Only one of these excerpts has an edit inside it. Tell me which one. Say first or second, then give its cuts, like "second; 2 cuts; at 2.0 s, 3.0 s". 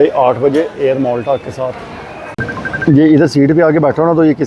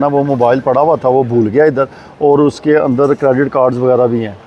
first; 1 cut; at 2.4 s